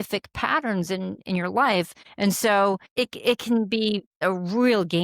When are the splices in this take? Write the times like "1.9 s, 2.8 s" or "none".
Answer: 2.0 s, 2.9 s, 4.2 s